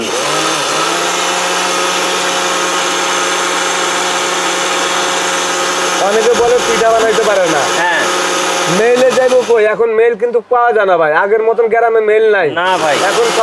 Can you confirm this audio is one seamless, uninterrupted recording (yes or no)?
yes